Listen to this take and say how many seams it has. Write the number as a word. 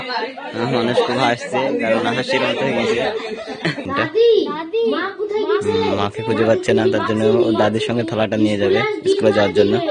one